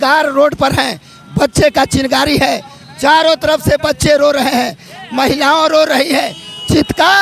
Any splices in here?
no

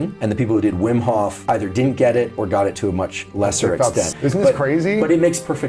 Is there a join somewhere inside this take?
yes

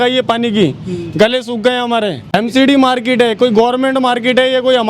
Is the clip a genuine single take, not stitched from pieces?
no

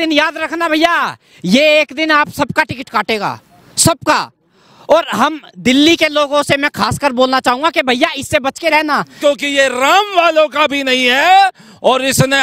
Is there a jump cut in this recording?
yes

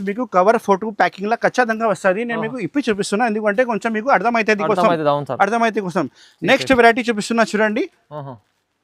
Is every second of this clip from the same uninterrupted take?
yes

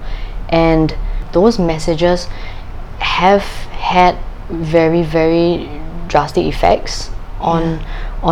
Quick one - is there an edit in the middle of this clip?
yes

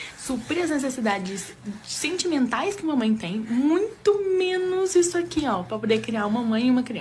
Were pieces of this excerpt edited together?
yes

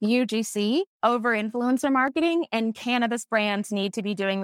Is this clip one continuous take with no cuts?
no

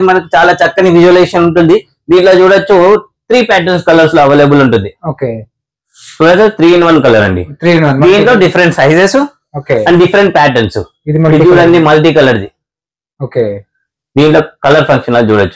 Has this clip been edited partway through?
no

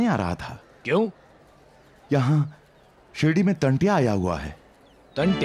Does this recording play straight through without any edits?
yes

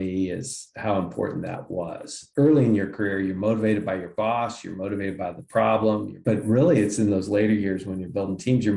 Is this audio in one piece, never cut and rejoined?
no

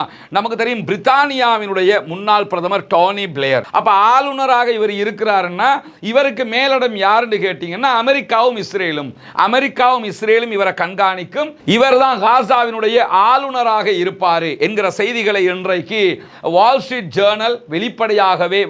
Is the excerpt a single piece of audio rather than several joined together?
no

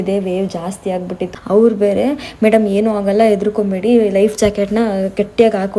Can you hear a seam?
yes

